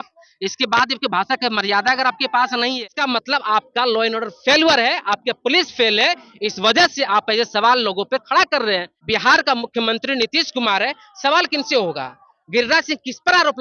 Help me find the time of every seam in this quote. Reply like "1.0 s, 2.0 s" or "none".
2.8 s, 8.9 s

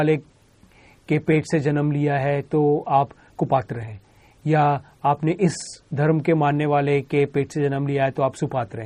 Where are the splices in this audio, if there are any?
none

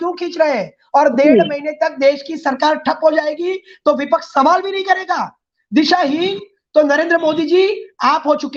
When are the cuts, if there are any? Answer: none

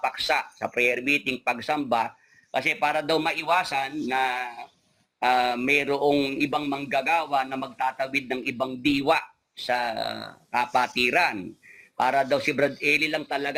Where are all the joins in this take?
none

